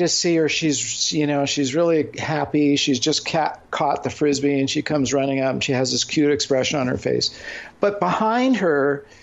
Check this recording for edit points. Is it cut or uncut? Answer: uncut